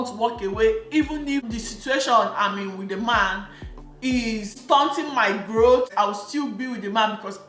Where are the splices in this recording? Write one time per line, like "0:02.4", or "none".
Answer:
0:05.9